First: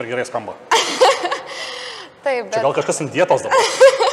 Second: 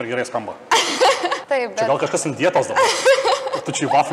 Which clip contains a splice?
second; 1 cut; at 1.4 s

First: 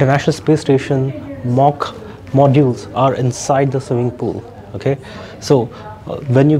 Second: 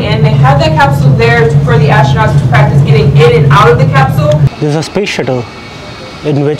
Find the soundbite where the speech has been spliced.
second; 1 cut; at 4.5 s

